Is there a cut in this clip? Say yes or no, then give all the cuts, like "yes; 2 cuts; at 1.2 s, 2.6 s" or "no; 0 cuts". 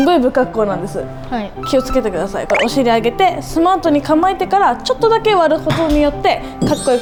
no; 0 cuts